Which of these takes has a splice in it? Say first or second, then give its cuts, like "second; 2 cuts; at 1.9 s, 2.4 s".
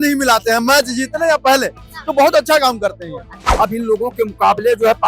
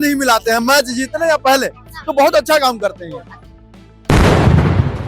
first; 1 cut; at 3.5 s